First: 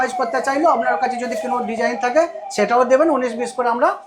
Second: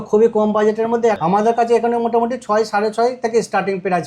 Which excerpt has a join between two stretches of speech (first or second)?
second